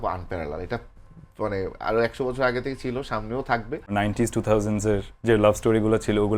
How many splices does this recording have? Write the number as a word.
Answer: one